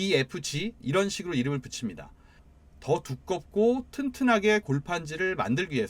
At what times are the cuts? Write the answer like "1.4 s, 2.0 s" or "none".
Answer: 2.4 s